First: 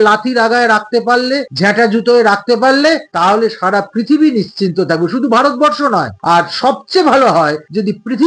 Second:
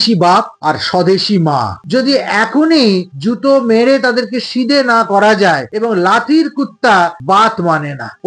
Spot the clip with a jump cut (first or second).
second